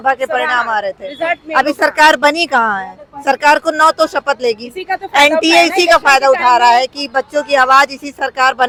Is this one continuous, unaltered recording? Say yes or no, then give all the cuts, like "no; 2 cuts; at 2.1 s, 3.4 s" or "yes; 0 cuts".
yes; 0 cuts